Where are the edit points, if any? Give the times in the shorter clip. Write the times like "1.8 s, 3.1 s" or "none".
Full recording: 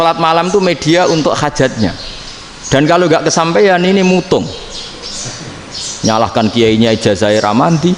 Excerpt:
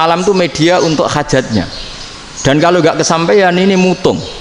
none